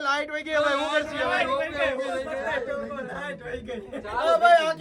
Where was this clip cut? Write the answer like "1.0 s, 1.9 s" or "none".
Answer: none